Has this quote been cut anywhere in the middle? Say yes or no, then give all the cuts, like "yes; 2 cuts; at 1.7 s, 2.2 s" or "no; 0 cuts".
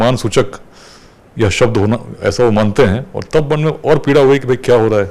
no; 0 cuts